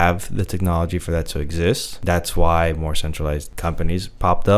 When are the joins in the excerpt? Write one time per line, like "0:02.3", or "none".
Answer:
0:01.9
0:03.5